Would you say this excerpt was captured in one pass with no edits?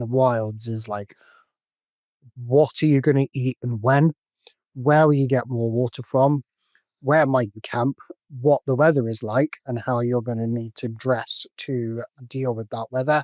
no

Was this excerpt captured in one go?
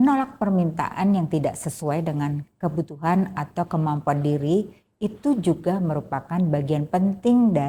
yes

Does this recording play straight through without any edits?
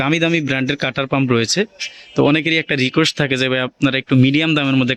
yes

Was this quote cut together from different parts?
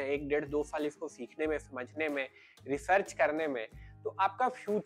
no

